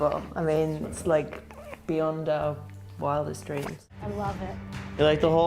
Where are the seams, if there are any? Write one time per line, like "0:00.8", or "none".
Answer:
0:04.0